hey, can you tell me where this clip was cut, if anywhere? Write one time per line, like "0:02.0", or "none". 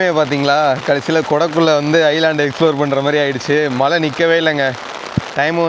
none